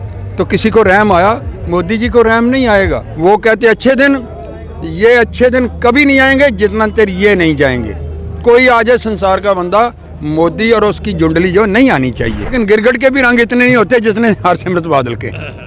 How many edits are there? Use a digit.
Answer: 2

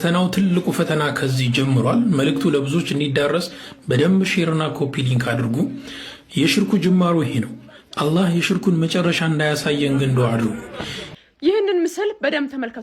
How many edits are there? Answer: 1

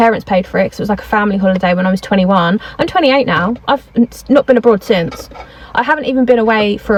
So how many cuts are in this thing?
0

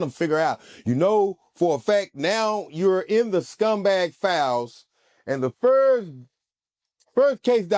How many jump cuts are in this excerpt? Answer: 0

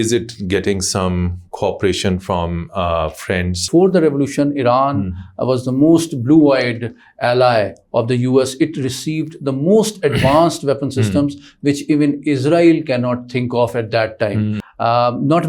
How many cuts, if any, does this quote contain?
2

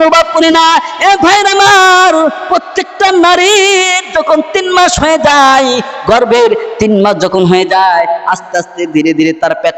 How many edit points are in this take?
0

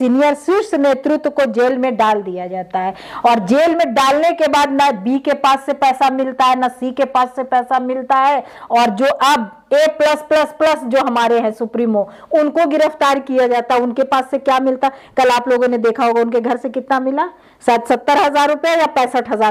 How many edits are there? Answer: 0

